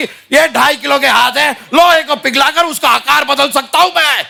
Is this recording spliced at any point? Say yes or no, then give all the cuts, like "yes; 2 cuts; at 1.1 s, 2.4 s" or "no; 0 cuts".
no; 0 cuts